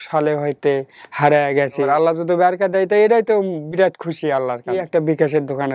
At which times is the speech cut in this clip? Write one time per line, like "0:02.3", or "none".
0:01.8
0:04.7